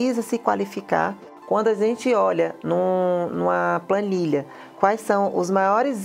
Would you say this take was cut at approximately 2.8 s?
no; 1 cut; at 1.3 s

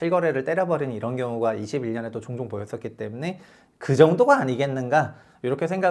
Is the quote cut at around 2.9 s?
no; 0 cuts

